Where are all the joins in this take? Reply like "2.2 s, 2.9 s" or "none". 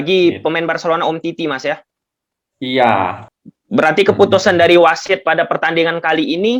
3.2 s